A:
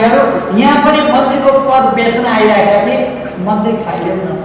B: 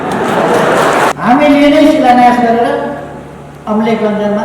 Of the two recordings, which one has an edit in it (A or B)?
B